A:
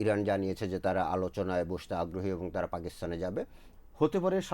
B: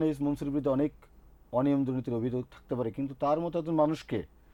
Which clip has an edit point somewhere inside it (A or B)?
A